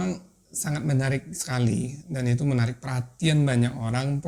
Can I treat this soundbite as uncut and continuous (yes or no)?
yes